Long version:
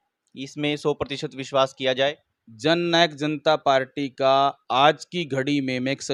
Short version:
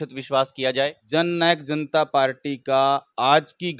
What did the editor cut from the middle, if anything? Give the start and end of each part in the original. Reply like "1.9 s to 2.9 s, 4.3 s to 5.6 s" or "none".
2.2 s to 2.5 s